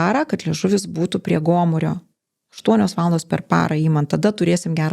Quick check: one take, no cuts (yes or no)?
yes